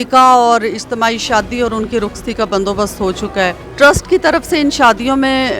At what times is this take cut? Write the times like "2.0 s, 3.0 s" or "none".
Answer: 3.6 s

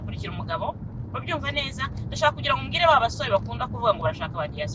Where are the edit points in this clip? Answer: none

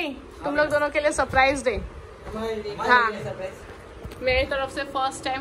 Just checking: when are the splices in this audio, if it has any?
none

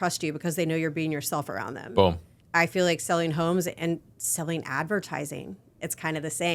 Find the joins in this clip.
2.3 s

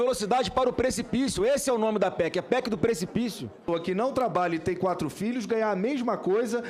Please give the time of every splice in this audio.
3.6 s

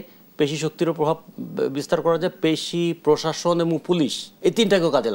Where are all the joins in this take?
4.2 s

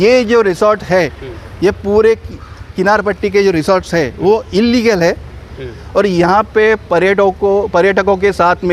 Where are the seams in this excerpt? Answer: none

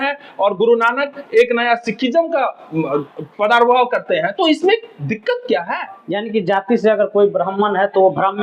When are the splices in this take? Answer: 5.9 s

